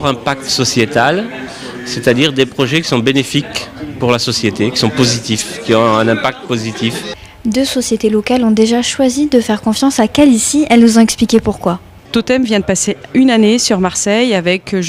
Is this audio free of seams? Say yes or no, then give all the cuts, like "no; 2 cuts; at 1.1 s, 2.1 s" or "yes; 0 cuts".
no; 1 cut; at 4.6 s